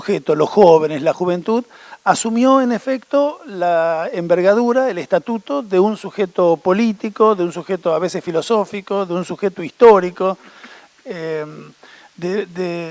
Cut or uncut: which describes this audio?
uncut